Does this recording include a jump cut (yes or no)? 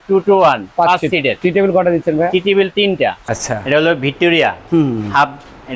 yes